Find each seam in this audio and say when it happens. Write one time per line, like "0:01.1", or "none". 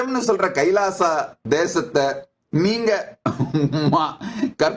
0:01.3